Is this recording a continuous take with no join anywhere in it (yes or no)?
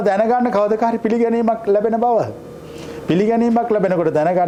yes